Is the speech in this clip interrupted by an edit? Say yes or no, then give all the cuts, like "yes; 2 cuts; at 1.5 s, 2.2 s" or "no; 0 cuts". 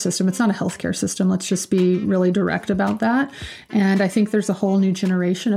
no; 0 cuts